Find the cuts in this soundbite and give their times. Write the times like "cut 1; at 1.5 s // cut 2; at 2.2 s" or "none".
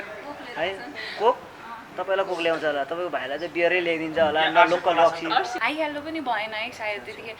cut 1; at 5.5 s